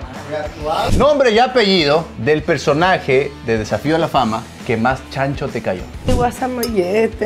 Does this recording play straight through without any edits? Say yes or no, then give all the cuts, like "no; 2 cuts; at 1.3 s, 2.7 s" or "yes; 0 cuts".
no; 5 cuts; at 0.9 s, 2.1 s, 3.4 s, 4.5 s, 5.9 s